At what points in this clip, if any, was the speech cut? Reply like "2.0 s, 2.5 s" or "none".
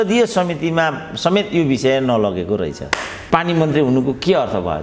3.1 s